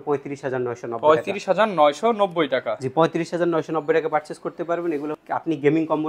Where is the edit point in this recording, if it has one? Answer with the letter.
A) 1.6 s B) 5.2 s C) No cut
B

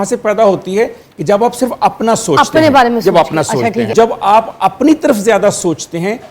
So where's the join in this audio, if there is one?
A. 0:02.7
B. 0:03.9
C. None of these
B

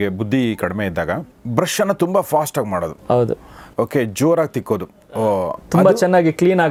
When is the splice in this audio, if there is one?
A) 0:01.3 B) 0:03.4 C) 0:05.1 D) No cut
D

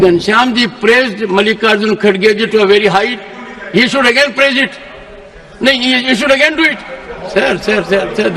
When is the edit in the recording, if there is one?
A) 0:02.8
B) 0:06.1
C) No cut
C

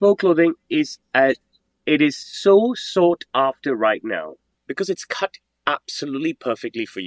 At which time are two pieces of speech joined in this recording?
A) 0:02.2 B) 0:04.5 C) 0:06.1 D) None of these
B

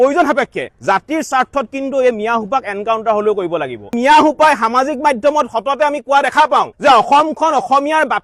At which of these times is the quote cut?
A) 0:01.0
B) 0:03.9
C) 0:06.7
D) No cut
B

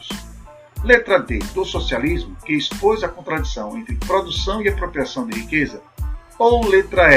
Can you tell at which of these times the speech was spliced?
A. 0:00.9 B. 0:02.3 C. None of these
C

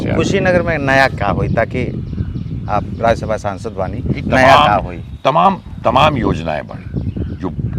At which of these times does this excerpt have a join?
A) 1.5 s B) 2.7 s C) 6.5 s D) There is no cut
D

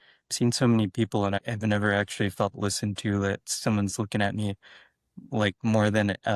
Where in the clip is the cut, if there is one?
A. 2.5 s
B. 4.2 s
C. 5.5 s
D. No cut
D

